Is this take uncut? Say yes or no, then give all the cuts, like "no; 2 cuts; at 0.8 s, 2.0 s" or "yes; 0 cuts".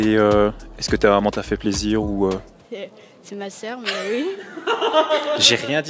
yes; 0 cuts